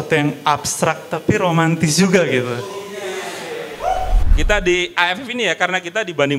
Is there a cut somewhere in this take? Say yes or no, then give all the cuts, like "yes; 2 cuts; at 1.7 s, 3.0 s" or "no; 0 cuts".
yes; 1 cut; at 4.2 s